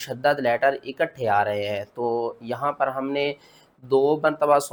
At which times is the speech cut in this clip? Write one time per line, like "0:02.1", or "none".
none